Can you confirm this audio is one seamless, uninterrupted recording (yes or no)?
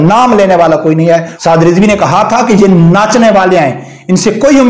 no